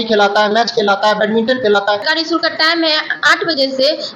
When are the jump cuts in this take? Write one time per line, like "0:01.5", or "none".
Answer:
0:02.1

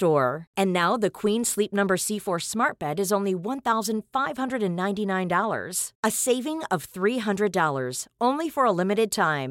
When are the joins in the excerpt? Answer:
none

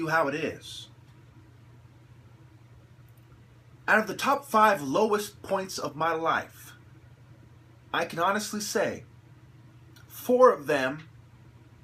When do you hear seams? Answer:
0:07.9

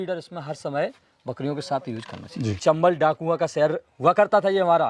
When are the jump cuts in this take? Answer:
0:02.6

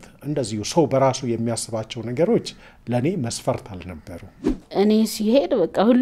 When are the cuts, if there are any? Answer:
0:04.6

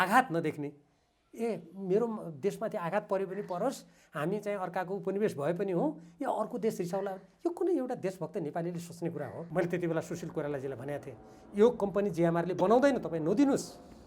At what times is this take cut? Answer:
0:09.4

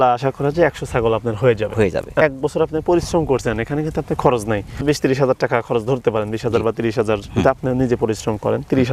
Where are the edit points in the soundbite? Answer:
0:02.2
0:04.8

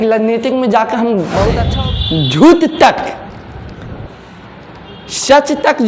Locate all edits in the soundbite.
0:01.7

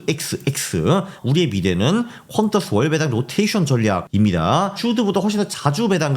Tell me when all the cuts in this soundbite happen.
0:01.1
0:04.1

